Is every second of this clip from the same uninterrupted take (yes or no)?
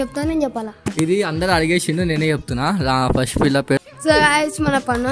no